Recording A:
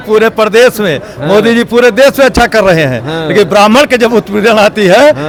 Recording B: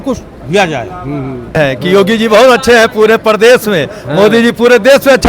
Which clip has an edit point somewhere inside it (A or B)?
B